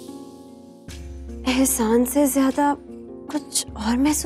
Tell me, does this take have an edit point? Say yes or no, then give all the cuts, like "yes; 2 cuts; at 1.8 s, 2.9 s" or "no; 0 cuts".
no; 0 cuts